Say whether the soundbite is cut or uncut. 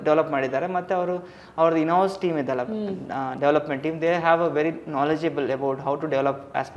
uncut